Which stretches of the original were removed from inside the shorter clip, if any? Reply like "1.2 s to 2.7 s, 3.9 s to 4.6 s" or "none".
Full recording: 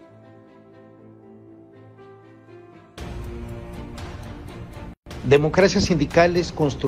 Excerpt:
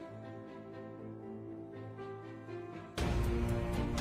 none